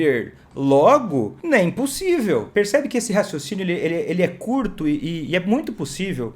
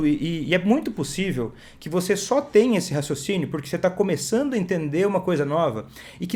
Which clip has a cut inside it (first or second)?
first